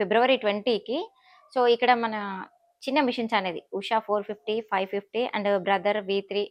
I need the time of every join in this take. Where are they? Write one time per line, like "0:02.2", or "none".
none